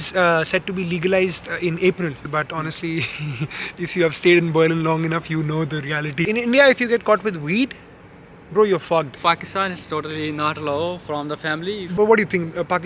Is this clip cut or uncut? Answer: cut